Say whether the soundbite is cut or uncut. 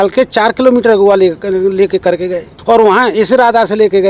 cut